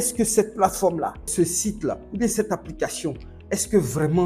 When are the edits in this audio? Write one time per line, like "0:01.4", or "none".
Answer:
0:01.3